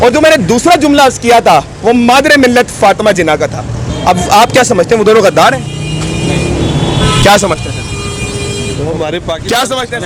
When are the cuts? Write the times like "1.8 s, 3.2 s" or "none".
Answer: none